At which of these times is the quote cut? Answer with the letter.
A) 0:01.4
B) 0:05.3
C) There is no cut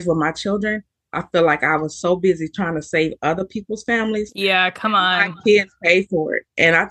B